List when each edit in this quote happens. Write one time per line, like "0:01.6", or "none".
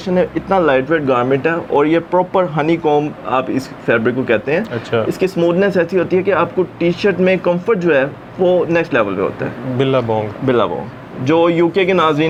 none